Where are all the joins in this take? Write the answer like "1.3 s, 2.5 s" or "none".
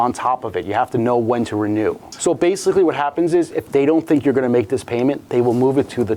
2.1 s